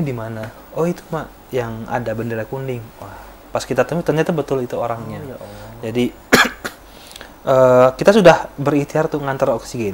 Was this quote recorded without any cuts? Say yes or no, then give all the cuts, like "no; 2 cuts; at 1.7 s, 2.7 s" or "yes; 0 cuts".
yes; 0 cuts